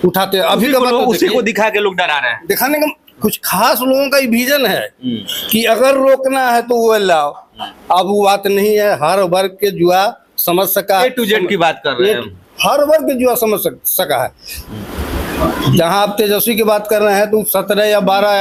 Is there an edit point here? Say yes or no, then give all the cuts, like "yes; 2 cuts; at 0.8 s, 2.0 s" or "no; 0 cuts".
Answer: no; 0 cuts